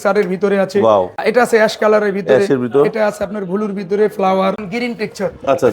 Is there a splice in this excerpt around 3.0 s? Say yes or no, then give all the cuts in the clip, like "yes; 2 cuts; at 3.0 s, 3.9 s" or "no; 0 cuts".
no; 2 cuts; at 1.2 s, 4.6 s